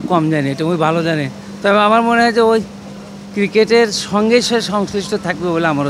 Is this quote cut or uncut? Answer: uncut